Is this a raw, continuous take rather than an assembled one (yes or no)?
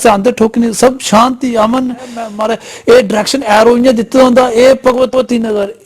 no